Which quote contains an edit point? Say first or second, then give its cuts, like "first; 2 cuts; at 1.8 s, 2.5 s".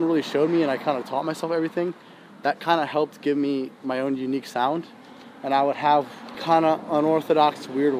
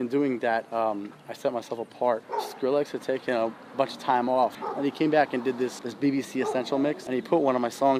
second; 4 cuts; at 2.3 s, 4.6 s, 5.8 s, 7.0 s